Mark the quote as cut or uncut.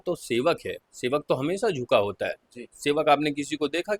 uncut